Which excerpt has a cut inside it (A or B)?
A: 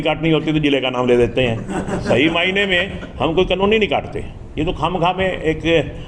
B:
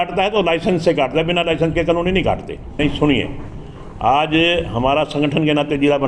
B